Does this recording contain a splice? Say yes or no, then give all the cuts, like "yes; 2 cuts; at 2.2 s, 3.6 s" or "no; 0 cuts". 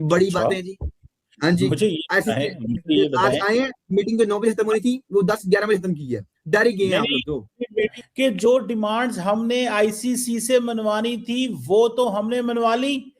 yes; 1 cut; at 8.0 s